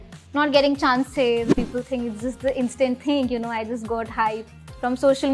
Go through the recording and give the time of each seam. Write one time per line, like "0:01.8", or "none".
0:01.5